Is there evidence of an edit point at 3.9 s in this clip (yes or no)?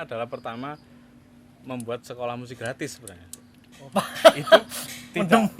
yes